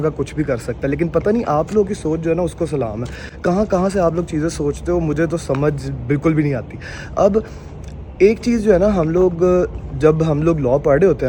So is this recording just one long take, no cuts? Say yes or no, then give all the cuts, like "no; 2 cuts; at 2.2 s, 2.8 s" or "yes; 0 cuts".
yes; 0 cuts